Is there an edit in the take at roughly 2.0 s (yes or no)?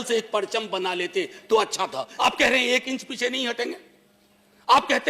yes